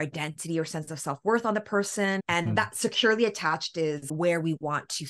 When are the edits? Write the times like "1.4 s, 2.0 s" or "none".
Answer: 4.1 s

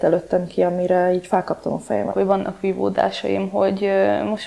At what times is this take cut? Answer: 2.1 s

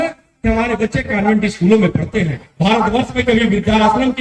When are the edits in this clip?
2.5 s

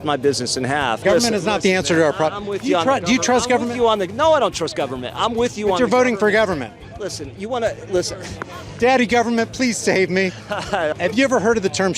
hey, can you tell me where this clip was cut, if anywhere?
1.0 s, 10.9 s

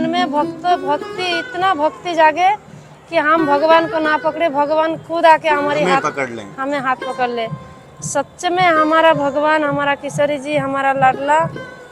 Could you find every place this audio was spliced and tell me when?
none

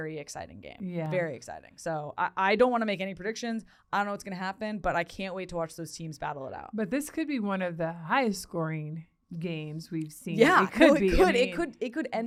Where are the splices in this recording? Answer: none

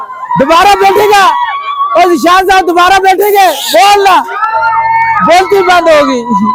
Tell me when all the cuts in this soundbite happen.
none

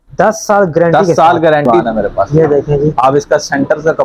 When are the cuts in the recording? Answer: 1.7 s

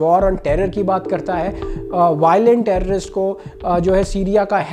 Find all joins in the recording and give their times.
1.6 s

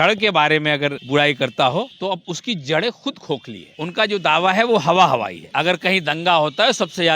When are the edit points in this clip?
1.0 s, 2.2 s, 3.6 s, 5.4 s

